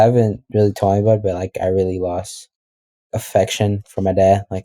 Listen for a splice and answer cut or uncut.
cut